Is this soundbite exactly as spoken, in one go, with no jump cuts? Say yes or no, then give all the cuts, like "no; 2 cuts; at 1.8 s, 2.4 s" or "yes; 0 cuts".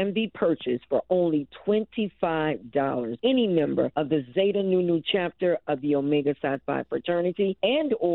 yes; 0 cuts